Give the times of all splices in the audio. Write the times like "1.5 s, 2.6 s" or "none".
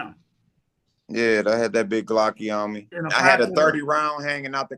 2.9 s